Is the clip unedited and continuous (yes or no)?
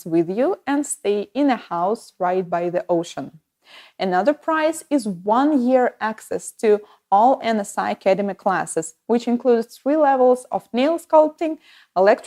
yes